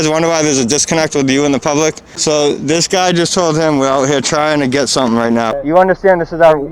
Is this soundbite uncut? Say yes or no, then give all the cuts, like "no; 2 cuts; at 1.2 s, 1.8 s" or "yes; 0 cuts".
no; 2 cuts; at 2.1 s, 5.5 s